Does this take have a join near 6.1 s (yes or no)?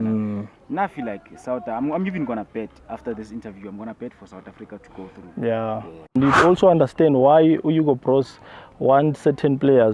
yes